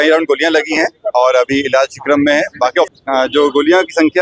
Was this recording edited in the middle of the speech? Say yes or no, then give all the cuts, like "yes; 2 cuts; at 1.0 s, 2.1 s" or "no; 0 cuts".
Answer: yes; 1 cut; at 2.9 s